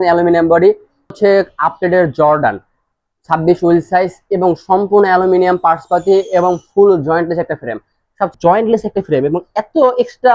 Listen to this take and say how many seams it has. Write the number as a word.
two